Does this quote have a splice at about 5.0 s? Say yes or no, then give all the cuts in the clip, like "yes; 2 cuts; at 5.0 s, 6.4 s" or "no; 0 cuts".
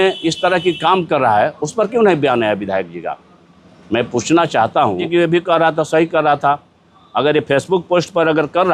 yes; 1 cut; at 5.0 s